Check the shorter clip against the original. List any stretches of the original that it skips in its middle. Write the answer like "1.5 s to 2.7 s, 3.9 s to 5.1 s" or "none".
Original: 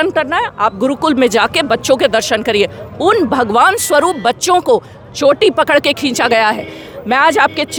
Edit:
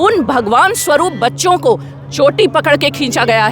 none